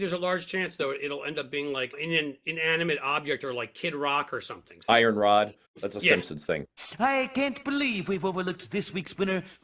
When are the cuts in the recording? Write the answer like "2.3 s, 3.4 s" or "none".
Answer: 4.8 s, 6.8 s

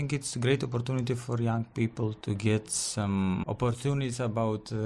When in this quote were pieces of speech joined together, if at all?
2.2 s, 3.4 s

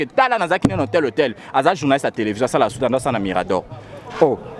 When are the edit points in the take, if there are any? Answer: none

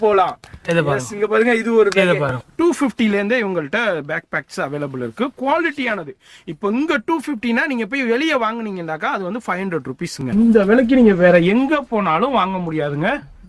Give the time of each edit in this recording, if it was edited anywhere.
2.4 s, 10.3 s

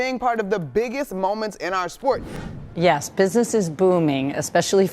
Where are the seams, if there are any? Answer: 2.3 s

